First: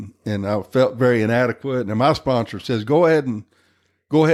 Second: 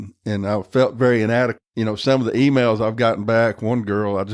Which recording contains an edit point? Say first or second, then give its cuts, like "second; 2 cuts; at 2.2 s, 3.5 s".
second; 1 cut; at 1.6 s